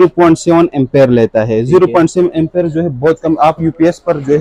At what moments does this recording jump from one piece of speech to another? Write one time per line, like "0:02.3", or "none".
none